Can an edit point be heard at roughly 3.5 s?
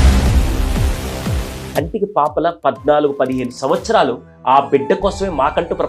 no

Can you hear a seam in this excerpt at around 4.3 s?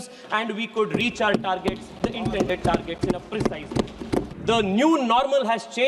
yes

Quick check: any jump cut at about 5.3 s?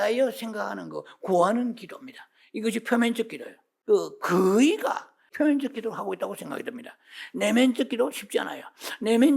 yes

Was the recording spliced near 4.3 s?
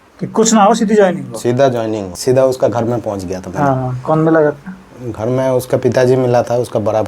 no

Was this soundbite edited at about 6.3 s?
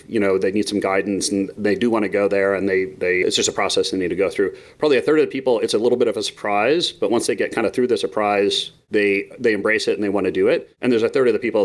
no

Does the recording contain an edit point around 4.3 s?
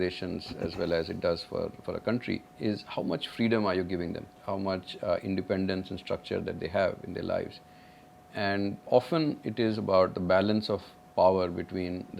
yes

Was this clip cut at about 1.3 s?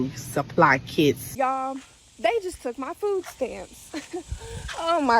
yes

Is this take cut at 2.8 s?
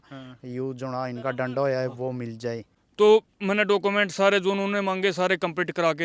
yes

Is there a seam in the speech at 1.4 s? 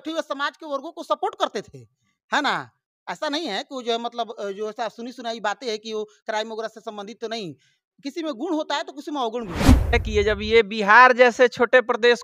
no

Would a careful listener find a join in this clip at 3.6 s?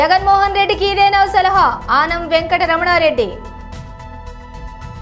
yes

